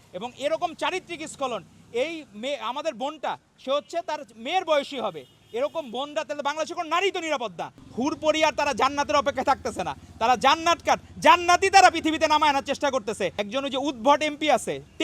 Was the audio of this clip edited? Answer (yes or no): yes